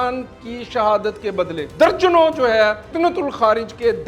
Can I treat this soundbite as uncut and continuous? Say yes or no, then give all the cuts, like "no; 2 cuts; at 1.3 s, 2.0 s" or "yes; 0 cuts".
no; 2 cuts; at 1.7 s, 2.9 s